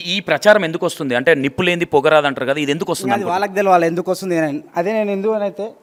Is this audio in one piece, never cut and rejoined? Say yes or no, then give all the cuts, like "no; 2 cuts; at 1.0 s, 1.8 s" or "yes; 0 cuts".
yes; 0 cuts